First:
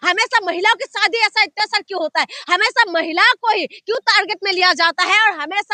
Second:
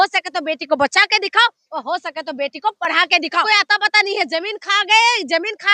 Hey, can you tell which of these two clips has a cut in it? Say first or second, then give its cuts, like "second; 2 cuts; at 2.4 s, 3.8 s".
second; 1 cut; at 3.4 s